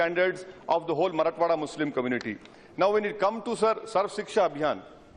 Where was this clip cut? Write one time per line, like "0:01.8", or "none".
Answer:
none